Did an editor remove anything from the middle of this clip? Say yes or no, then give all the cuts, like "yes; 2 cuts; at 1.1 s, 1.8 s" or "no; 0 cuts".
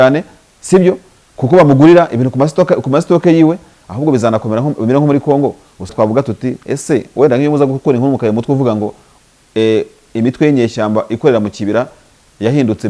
yes; 1 cut; at 5.9 s